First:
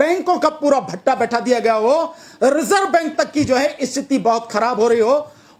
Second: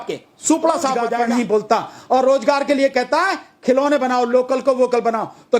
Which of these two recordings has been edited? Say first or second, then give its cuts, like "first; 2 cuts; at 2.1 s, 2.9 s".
second; 1 cut; at 1.1 s